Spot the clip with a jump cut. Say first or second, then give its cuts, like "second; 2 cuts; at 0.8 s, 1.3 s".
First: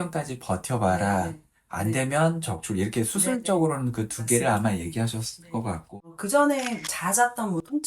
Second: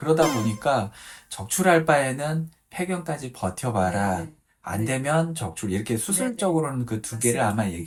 first; 1 cut; at 5.9 s